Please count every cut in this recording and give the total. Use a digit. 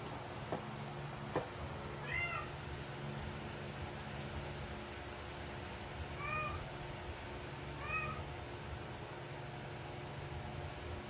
0